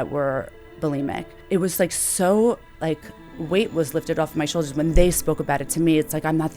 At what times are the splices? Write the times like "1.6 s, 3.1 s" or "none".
1.3 s